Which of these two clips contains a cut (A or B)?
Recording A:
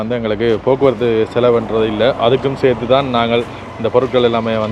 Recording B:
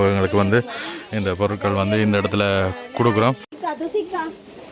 B